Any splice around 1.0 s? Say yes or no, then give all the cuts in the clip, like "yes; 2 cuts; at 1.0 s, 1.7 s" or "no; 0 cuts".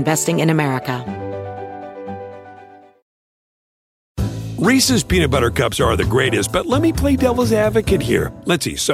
yes; 1 cut; at 1.0 s